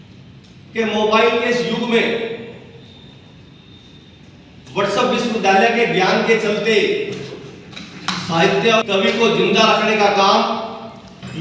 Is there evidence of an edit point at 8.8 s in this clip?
yes; 1 cut; at 8.8 s

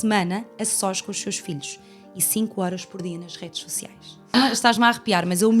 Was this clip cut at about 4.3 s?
yes; 1 cut; at 4.3 s

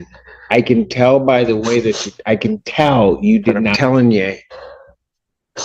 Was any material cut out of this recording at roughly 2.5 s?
no; 1 cut; at 3.8 s

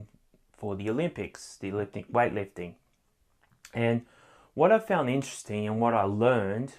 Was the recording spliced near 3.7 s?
yes; 1 cut; at 3.7 s

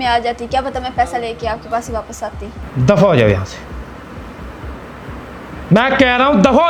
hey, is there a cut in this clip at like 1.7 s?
no; 0 cuts

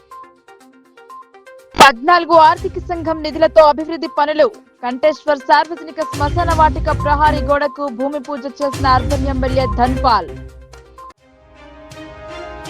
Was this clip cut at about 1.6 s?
yes; 1 cut; at 1.6 s

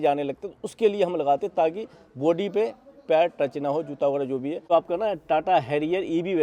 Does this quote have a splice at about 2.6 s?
no; 1 cut; at 4.7 s

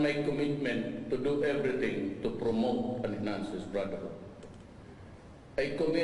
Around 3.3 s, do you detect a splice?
yes; 1 cut; at 3.3 s

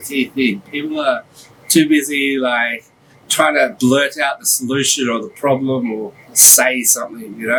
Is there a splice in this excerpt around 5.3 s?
no; 0 cuts

